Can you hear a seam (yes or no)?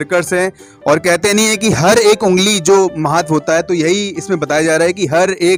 no